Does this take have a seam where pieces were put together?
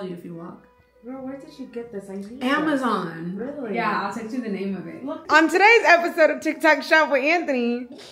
yes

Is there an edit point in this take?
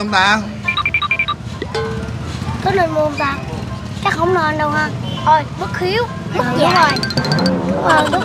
no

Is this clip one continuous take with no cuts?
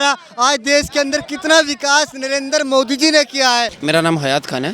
no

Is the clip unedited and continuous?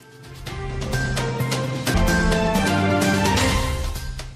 no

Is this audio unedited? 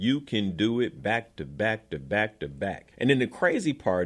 no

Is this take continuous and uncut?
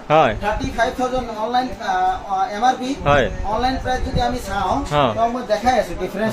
yes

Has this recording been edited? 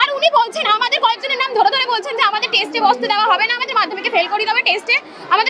no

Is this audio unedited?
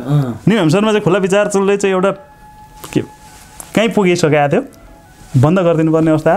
yes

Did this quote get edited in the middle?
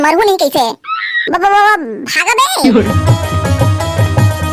yes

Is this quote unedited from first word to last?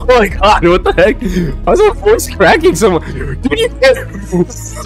yes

